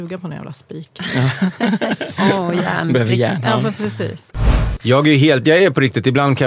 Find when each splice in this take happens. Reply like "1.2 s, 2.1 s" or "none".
4.5 s